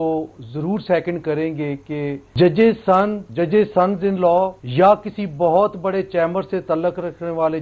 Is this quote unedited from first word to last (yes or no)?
no